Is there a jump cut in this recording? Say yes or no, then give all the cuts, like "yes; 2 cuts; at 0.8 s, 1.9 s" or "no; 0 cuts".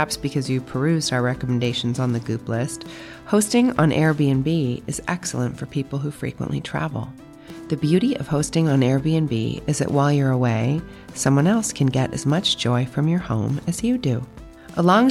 no; 0 cuts